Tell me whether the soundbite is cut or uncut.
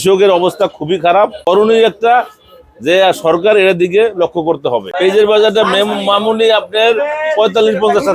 cut